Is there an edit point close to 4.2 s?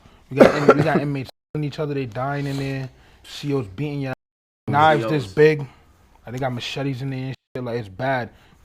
yes; 1 cut; at 4.2 s

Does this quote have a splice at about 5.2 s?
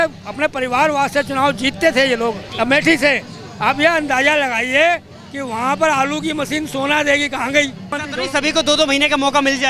no; 2 cuts; at 2.5 s, 8.0 s

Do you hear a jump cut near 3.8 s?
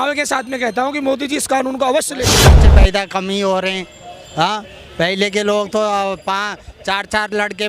no; 1 cut; at 2.6 s

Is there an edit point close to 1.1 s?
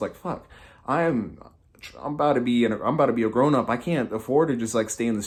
no; 0 cuts

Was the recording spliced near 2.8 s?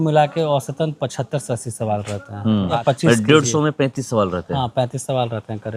yes; 1 cut; at 2.8 s

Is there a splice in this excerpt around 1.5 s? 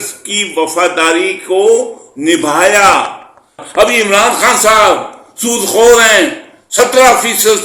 no; 1 cut; at 3.6 s

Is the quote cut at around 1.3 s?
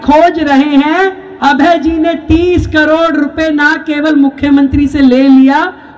yes; 1 cut; at 1.3 s

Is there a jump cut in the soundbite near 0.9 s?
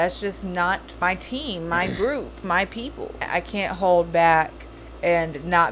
yes; 2 cuts; at 0.9 s, 3.3 s

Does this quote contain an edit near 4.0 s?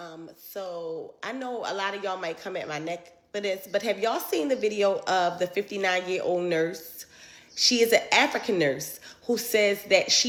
no; 0 cuts

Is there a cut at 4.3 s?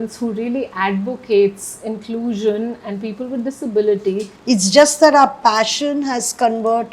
yes; 1 cut; at 4.3 s

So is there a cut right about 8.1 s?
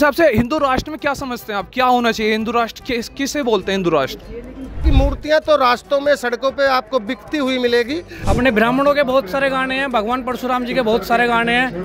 yes; 2 cuts; at 4.9 s, 8.1 s

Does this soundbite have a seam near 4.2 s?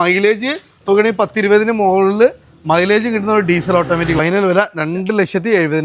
yes; 1 cut; at 4.2 s

